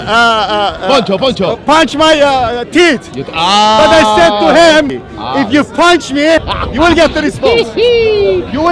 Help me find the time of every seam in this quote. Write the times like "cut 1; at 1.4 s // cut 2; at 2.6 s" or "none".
cut 1; at 4.9 s // cut 2; at 6.6 s